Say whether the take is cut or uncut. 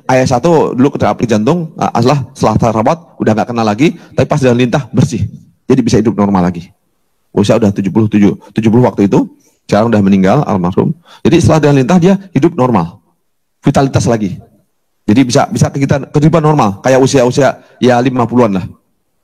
cut